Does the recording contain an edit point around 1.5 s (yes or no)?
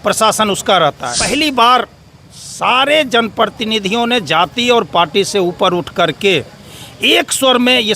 yes